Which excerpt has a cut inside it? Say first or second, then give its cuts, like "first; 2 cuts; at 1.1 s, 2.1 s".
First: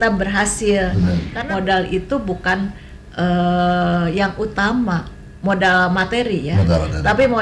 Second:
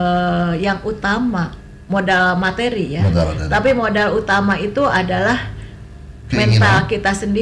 first; 1 cut; at 1.3 s